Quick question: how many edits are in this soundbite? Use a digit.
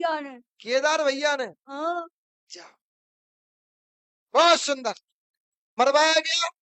1